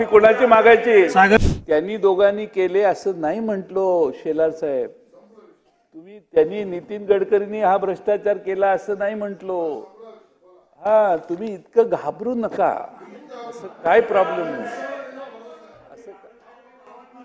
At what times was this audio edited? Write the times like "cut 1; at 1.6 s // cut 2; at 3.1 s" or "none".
cut 1; at 1.4 s